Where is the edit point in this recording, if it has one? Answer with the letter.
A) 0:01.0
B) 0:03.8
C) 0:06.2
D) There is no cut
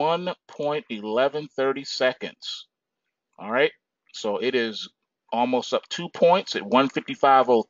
D